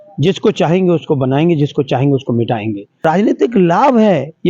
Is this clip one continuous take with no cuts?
no; 1 cut; at 3.0 s

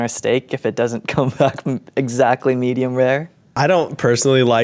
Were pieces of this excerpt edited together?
yes; 1 cut; at 3.5 s

